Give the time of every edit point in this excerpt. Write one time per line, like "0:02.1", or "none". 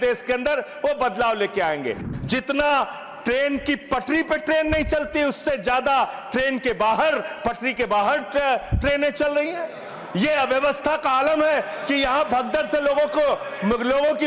0:02.0